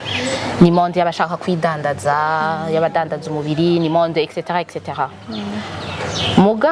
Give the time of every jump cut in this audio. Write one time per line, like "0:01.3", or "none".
none